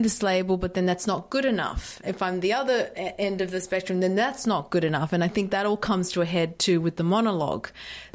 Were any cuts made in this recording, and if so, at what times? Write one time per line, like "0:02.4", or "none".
0:02.0